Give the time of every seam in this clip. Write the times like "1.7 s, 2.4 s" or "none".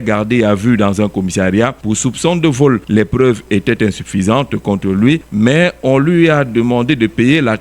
1.8 s, 2.8 s, 5.3 s